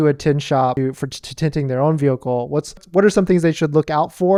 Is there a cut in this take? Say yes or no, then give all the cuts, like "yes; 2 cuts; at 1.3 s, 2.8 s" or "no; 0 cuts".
no; 0 cuts